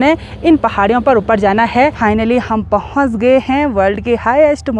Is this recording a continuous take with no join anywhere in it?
no; 1 cut; at 2.0 s

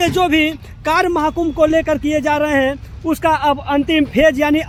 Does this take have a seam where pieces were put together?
no; 0 cuts

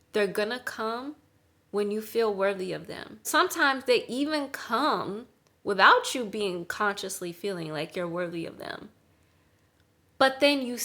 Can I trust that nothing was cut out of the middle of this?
no; 1 cut; at 3.3 s

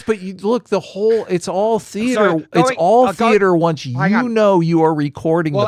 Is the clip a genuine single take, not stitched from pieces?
yes; 0 cuts

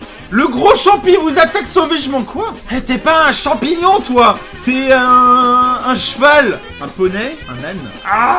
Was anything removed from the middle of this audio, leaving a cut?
no; 0 cuts

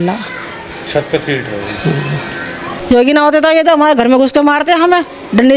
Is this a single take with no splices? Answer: no; 1 cut; at 2.7 s

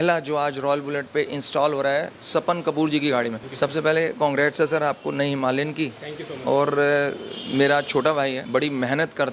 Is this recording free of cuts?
no; 3 cuts; at 2.2 s, 3.4 s, 8.4 s

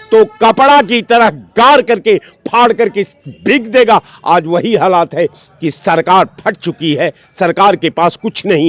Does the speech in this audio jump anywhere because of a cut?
no; 0 cuts

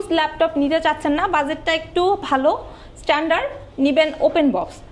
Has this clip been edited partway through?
no; 0 cuts

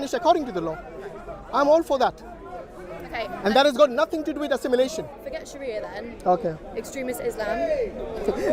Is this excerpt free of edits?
no; 1 cut; at 5.2 s

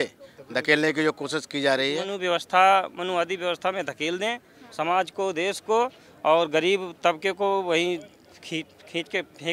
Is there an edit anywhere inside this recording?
yes; 1 cut; at 2.1 s

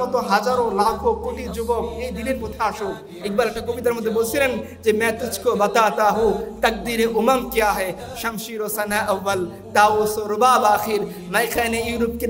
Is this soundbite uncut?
no; 1 cut; at 3.2 s

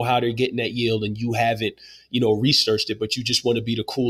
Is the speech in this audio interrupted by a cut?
no; 0 cuts

